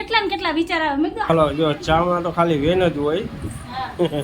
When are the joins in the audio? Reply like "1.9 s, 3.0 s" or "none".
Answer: 1.3 s